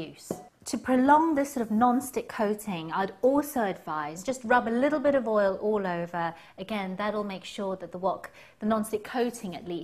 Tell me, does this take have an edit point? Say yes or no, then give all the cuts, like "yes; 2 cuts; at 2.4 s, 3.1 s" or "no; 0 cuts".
yes; 1 cut; at 7.5 s